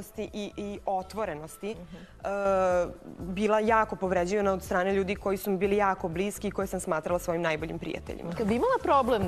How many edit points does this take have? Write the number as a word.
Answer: one